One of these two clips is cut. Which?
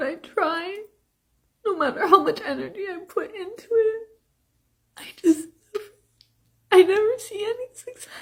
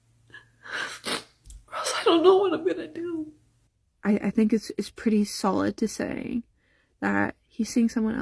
second; 1 cut; at 3.4 s

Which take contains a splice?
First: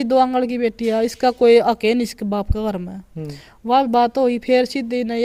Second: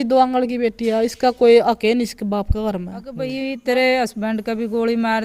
second; 1 cut; at 3.3 s

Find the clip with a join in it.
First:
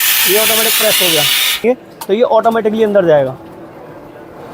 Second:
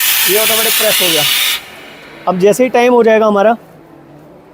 first; 1 cut; at 1.6 s

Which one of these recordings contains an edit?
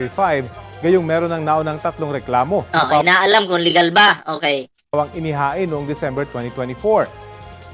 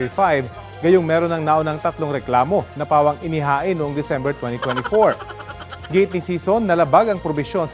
second; 1 cut; at 3.0 s

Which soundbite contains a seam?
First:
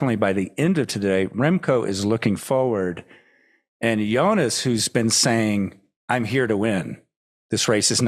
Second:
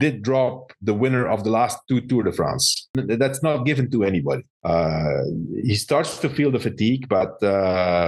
second; 2 cuts; at 2.9 s, 4.5 s

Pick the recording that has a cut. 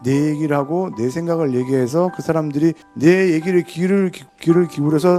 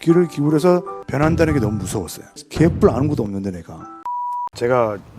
second; 2 cuts; at 2.4 s, 4.1 s

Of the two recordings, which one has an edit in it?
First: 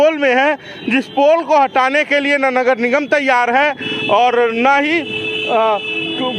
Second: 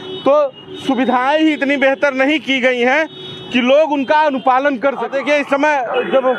second; 1 cut; at 5.1 s

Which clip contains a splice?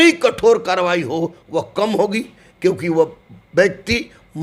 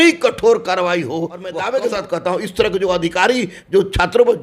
second; 1 cut; at 1.6 s

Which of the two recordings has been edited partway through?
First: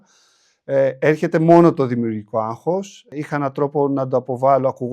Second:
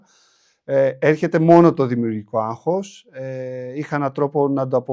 first; 1 cut; at 3.0 s

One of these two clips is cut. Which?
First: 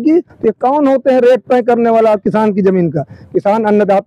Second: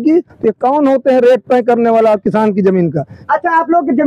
second; 1 cut; at 3.1 s

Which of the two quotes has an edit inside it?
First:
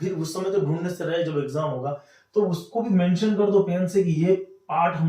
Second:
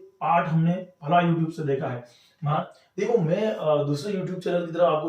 second; 1 cut; at 2.5 s

